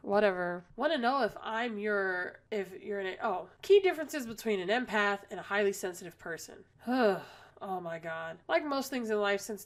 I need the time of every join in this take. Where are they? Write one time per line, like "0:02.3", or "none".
none